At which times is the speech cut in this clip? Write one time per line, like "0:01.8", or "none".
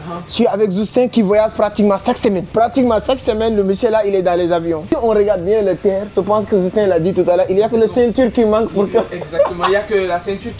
0:02.4
0:04.9
0:06.0